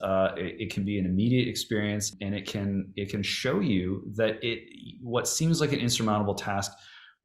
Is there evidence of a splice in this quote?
yes; 1 cut; at 2.1 s

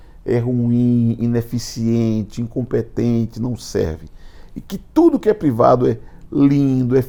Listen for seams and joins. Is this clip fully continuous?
yes; 0 cuts

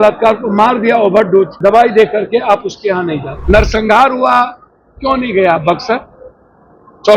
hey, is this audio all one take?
no; 2 cuts; at 1.5 s, 3.3 s

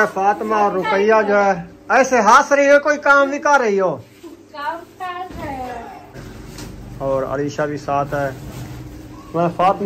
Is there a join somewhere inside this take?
yes; 1 cut; at 6.2 s

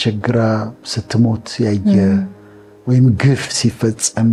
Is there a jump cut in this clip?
no; 0 cuts

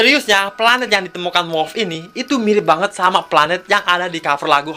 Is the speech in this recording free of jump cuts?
yes; 0 cuts

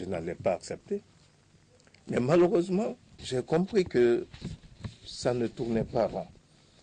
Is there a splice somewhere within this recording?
yes; 1 cut; at 3.2 s

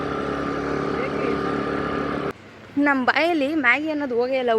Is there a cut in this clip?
yes; 1 cut; at 2.3 s

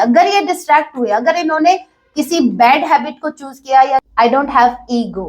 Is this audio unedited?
no; 1 cut; at 4.1 s

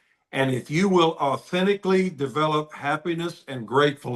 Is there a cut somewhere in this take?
no; 0 cuts

